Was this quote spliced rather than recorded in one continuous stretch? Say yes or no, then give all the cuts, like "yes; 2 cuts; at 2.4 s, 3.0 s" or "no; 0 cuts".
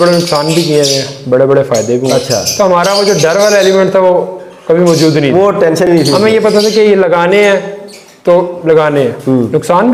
no; 0 cuts